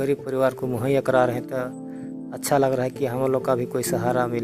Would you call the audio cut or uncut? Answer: uncut